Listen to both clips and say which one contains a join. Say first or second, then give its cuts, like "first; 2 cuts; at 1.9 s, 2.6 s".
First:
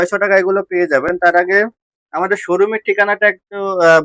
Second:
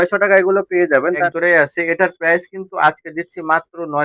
second; 1 cut; at 1.1 s